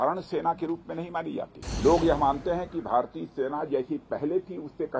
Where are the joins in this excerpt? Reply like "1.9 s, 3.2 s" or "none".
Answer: 1.6 s